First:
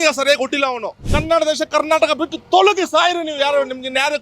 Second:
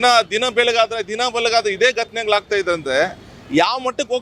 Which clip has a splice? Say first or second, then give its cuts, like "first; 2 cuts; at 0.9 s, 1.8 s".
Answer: first; 1 cut; at 1.1 s